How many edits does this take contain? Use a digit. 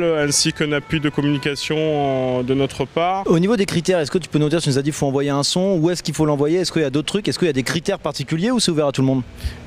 0